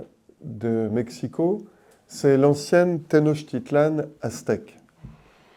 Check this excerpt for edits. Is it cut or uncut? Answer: uncut